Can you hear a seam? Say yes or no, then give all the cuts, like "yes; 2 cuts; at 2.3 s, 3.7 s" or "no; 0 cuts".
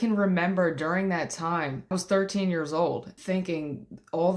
yes; 2 cuts; at 1.9 s, 3.1 s